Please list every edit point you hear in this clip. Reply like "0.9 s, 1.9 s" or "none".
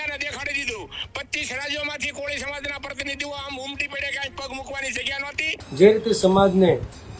5.6 s